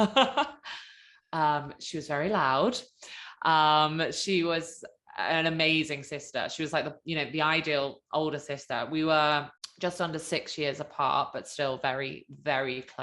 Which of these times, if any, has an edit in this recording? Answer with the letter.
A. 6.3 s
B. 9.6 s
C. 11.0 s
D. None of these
B